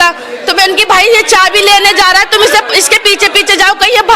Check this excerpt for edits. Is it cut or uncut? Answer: uncut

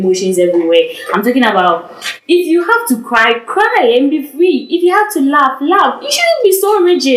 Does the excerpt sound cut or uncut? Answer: uncut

